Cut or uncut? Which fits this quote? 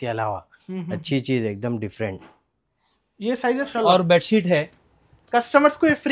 cut